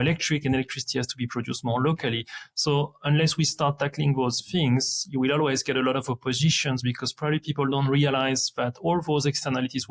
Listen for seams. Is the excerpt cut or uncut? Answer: uncut